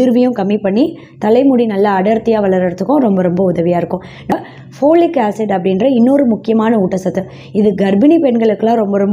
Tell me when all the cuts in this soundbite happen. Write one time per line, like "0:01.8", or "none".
0:04.3